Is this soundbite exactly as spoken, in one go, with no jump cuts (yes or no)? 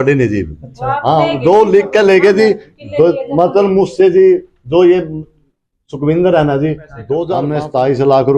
no